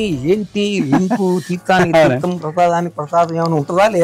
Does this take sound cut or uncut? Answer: uncut